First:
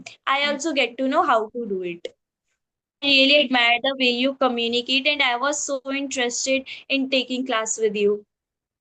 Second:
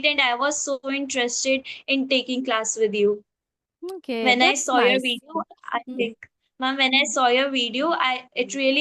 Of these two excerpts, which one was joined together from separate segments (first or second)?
first